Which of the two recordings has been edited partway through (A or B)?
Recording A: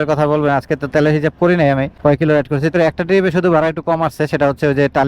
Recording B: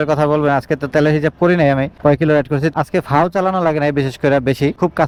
A